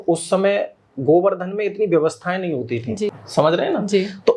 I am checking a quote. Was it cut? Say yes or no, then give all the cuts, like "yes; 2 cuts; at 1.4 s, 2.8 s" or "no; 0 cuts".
yes; 1 cut; at 3.2 s